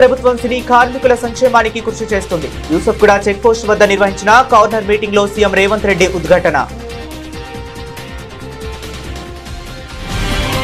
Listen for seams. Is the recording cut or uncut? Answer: cut